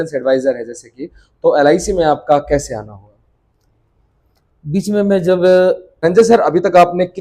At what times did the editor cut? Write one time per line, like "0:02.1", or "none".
0:06.0